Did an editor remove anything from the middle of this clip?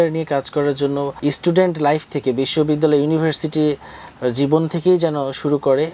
yes; 1 cut; at 1.1 s

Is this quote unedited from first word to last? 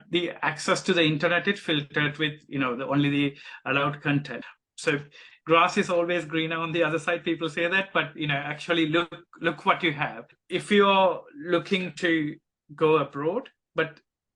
no; 2 cuts; at 4.4 s, 10.4 s

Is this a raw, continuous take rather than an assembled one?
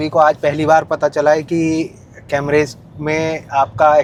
yes; 0 cuts

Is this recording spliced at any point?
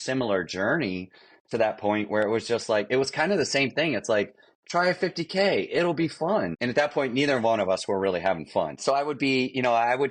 yes; 2 cuts; at 6.6 s, 8.8 s

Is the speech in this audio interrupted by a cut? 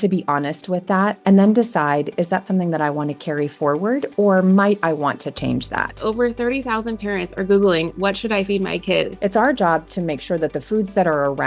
yes; 3 cuts; at 1.2 s, 6.0 s, 9.1 s

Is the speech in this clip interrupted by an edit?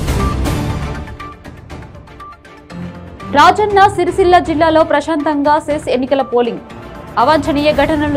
no; 0 cuts

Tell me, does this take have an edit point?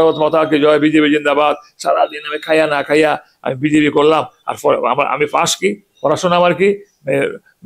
no; 0 cuts

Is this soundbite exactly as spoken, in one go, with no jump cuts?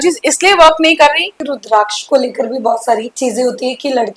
no; 2 cuts; at 1.4 s, 3.1 s

